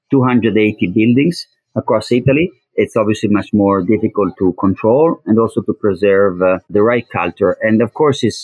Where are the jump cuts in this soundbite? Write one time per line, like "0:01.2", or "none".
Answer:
0:02.6
0:07.0